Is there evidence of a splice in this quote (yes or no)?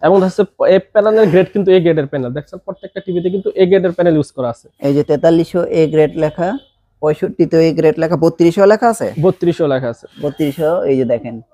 no